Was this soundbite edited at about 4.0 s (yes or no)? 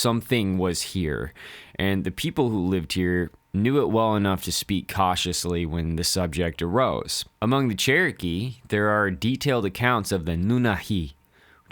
no